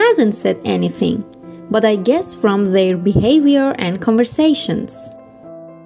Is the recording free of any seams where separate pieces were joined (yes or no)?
no